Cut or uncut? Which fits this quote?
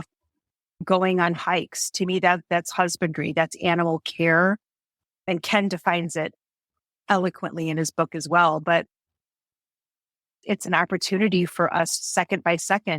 cut